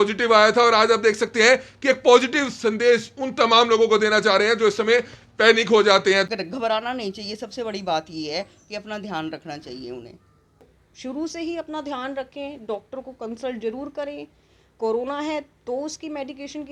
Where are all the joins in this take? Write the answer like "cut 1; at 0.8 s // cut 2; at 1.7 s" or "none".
cut 1; at 6.2 s // cut 2; at 10.8 s